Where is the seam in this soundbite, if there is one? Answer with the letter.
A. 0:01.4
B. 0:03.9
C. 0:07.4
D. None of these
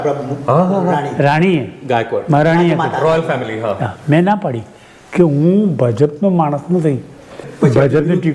C